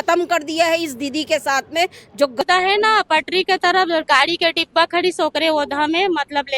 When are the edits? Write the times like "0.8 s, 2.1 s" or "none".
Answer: 2.4 s